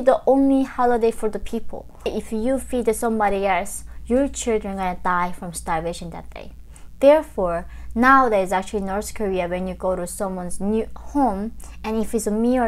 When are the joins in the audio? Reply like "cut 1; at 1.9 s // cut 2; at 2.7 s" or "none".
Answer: cut 1; at 2.2 s